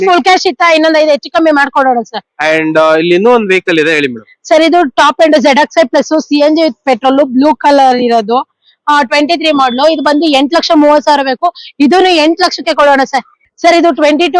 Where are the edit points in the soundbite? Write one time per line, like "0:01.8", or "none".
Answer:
0:13.4